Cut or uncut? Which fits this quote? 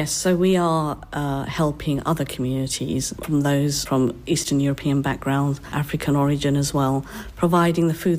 uncut